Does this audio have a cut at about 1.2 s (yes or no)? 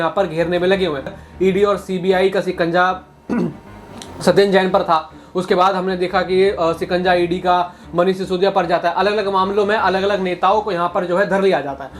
yes